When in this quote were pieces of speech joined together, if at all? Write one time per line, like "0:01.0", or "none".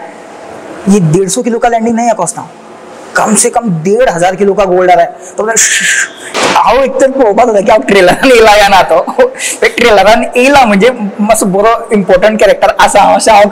0:06.3

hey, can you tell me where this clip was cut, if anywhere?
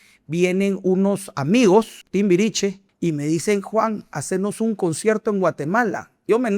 0:02.0
0:02.9

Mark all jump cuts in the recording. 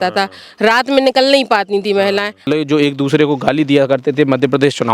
0:02.5

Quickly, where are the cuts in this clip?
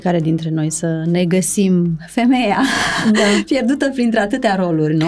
none

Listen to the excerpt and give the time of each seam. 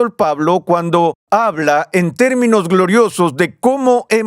0:01.2

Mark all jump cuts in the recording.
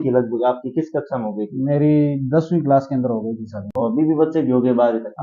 none

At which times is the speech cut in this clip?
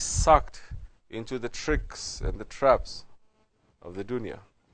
none

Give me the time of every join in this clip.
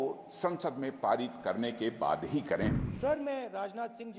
0:02.8

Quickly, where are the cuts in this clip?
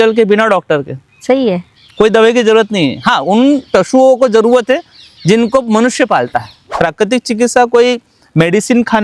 0:06.7

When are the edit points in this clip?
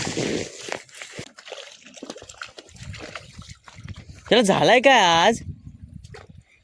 0:01.3

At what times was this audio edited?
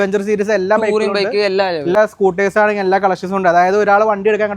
0:02.0

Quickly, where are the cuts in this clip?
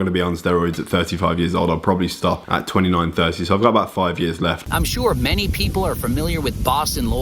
0:04.6

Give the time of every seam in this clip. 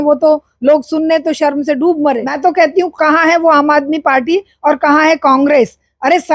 0:02.3

